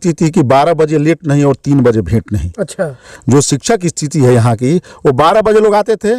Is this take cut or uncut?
uncut